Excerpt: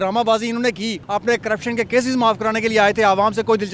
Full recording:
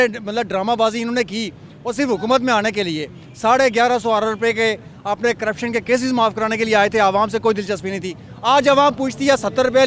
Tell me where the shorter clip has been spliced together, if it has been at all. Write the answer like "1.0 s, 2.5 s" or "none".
1.0 s